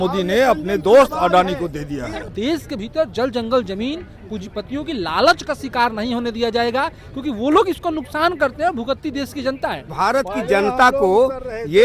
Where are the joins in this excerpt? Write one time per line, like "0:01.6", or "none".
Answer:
0:02.2
0:09.9